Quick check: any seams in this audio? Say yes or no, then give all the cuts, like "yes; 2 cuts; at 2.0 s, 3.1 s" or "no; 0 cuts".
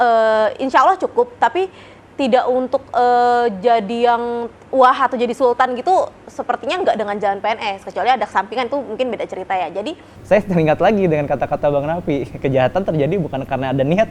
yes; 1 cut; at 10.1 s